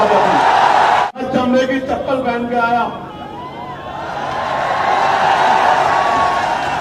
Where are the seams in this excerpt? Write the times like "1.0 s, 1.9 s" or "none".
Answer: 1.0 s